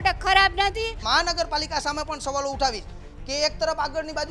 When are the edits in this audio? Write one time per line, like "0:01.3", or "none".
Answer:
0:01.0